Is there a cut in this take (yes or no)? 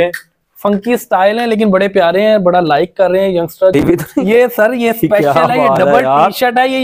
yes